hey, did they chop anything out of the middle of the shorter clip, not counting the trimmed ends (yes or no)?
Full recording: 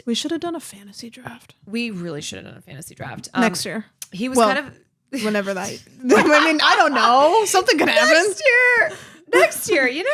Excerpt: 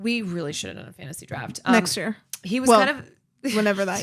no